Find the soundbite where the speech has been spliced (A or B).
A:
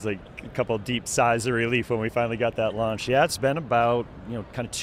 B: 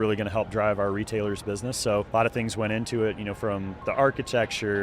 B